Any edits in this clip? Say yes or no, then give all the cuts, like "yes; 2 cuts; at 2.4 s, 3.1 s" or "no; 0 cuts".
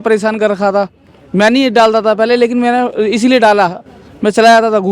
no; 0 cuts